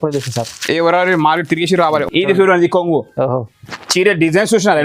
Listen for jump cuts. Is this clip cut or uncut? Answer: cut